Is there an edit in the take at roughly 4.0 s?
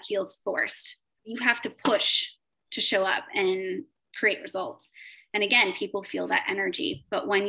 yes; 2 cuts; at 1.1 s, 4.0 s

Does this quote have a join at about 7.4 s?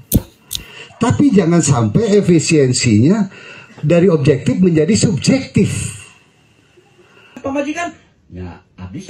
yes; 1 cut; at 7.4 s

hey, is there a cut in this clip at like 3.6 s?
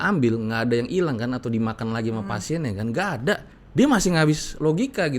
yes; 1 cut; at 3.6 s

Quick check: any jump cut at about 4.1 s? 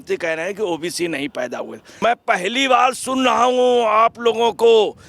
no; 1 cut; at 1.8 s

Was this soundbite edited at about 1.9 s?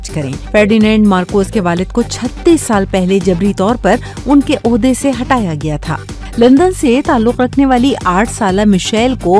no; 1 cut; at 6.0 s

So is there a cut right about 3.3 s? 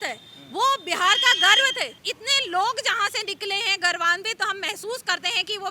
no; 1 cut; at 2.1 s

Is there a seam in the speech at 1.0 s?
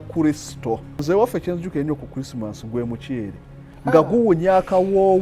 yes; 1 cut; at 1.0 s

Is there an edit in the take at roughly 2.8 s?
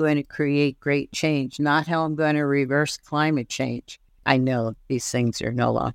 no; 1 cut; at 4.2 s

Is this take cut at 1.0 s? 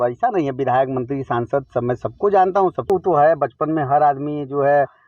no; 1 cut; at 2.9 s

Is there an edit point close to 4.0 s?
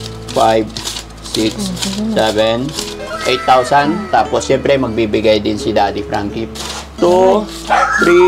yes; 2 cuts; at 4.0 s, 6.4 s

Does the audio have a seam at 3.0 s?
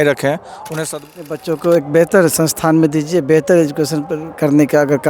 no; 1 cut; at 1.1 s

